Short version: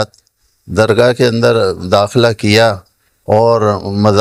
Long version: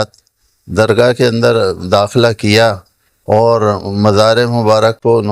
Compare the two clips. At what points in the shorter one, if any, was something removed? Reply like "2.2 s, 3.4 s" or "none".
none